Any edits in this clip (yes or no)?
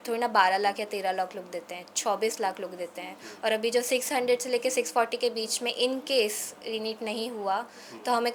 no